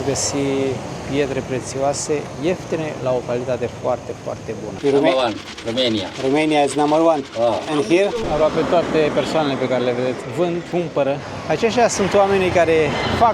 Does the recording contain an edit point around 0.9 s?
no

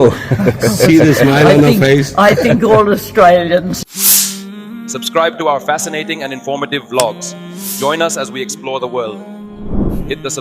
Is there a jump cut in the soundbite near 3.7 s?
yes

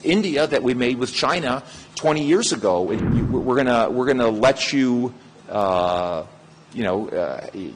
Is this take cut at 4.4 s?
no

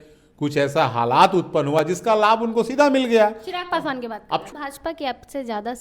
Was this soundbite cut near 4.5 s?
yes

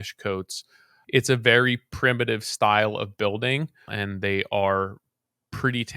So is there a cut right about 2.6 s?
no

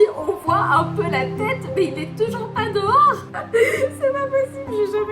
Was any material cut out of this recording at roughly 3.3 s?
yes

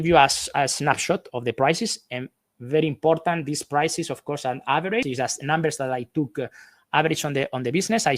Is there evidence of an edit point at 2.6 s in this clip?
no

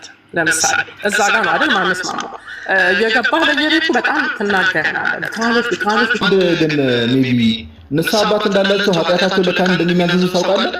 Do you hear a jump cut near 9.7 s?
no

